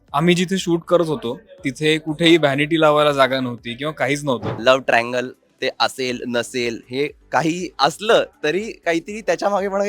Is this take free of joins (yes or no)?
no